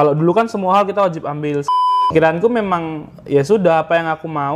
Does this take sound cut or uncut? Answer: cut